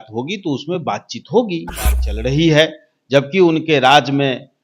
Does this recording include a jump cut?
yes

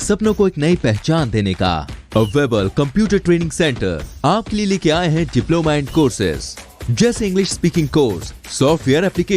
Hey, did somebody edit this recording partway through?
no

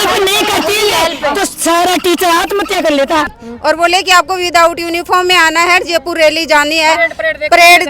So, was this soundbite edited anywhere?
yes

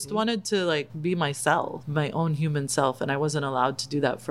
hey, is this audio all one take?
no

